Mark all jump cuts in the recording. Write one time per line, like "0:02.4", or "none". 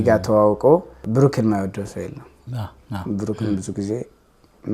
0:00.9